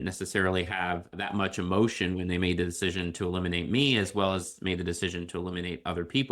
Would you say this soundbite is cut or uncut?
cut